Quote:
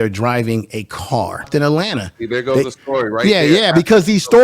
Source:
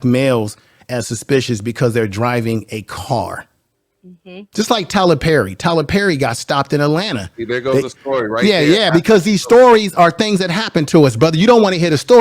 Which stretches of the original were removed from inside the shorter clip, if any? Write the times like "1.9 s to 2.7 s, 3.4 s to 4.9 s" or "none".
3.5 s to 6.7 s